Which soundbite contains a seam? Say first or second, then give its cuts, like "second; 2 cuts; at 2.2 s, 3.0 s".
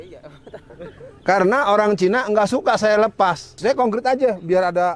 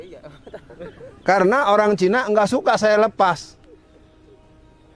first; 1 cut; at 3.5 s